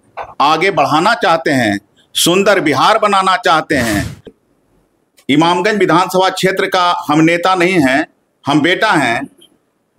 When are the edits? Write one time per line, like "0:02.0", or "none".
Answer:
0:04.3